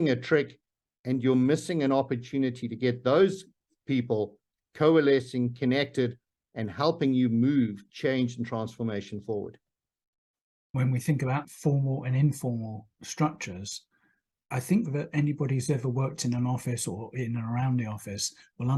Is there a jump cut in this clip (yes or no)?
no